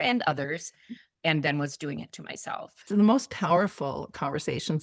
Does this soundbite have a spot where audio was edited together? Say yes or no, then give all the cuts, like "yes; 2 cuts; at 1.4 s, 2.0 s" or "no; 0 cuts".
yes; 1 cut; at 2.7 s